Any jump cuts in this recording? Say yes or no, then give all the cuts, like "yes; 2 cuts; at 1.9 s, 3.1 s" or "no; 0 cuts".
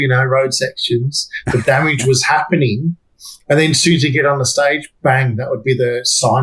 no; 0 cuts